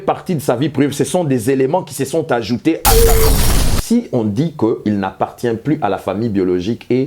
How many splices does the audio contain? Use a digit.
1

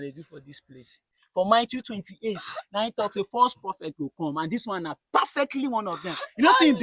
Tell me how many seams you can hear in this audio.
1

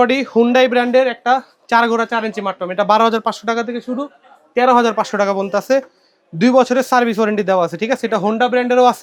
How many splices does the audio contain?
0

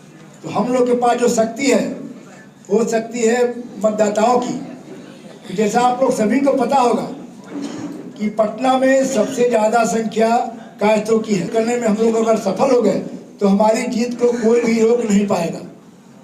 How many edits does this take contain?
1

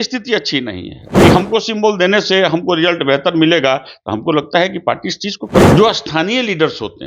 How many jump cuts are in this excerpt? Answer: 2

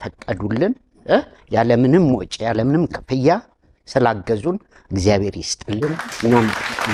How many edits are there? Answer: 0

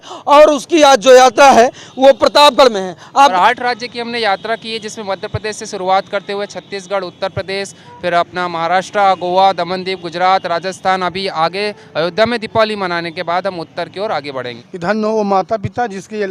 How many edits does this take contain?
2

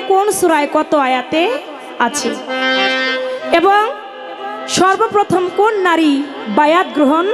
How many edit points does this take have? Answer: 0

